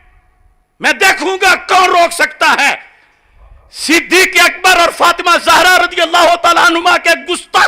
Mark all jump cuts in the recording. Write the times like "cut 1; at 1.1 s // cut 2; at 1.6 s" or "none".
none